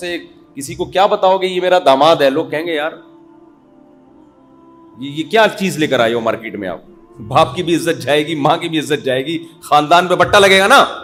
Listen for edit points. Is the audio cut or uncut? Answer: uncut